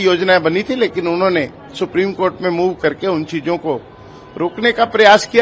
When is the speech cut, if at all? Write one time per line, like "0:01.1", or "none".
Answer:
none